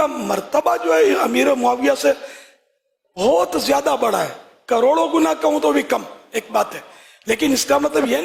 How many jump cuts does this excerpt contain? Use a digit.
0